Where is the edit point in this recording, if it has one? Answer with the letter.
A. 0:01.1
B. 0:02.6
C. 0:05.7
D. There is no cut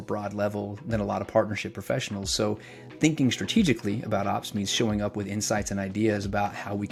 D